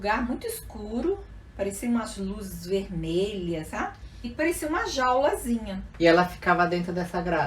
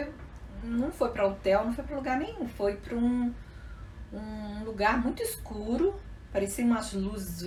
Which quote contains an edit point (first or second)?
first